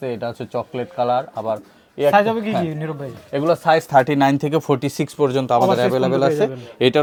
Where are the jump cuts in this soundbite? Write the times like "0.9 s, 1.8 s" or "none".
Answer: none